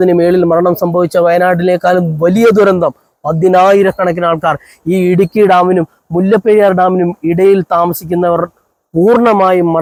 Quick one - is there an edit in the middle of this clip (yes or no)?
no